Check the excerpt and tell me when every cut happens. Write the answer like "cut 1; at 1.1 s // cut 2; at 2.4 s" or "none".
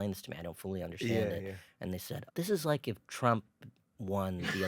cut 1; at 2.1 s

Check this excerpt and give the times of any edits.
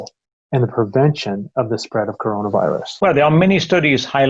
cut 1; at 2.9 s

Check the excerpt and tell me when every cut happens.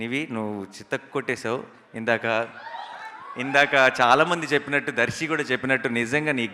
none

